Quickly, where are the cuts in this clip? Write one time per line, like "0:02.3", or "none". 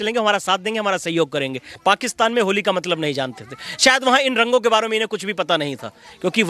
0:01.7